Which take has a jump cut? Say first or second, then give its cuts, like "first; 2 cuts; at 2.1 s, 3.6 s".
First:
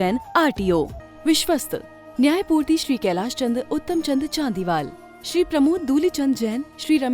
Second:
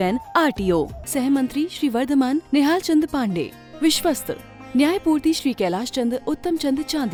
first; 1 cut; at 1.0 s